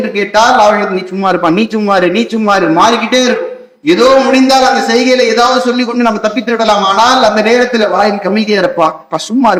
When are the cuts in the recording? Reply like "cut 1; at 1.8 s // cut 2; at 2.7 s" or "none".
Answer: none